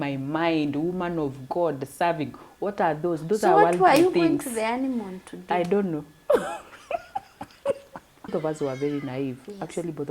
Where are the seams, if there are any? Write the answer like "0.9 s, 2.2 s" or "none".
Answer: 8.3 s